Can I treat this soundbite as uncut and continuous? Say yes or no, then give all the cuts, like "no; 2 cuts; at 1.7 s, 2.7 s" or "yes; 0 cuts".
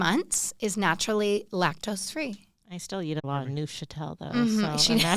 yes; 0 cuts